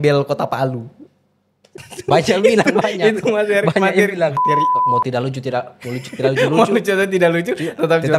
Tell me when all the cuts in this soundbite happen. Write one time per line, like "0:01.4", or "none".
0:04.8